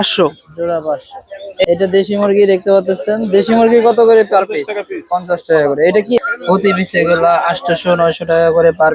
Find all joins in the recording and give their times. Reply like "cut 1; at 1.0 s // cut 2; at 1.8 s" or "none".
cut 1; at 1.7 s // cut 2; at 6.2 s

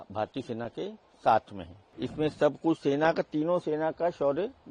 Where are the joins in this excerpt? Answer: cut 1; at 2.0 s

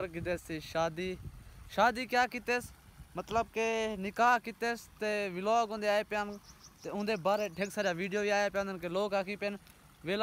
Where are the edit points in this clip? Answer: none

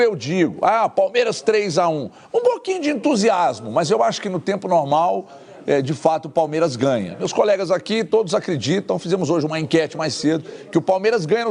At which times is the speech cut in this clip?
none

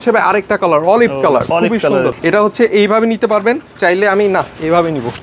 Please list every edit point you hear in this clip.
cut 1; at 2.2 s

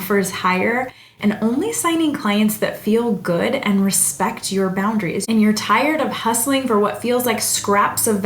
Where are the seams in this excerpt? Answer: cut 1; at 5.2 s

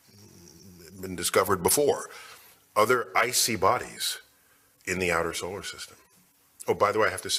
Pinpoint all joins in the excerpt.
none

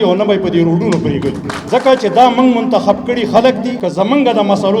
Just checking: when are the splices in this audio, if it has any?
cut 1; at 1.5 s // cut 2; at 3.8 s

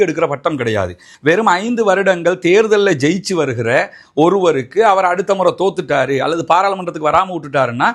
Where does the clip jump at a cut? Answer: cut 1; at 1.1 s

